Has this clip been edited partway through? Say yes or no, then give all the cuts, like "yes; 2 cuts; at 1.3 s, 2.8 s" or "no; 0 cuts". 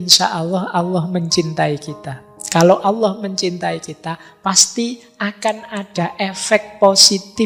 no; 0 cuts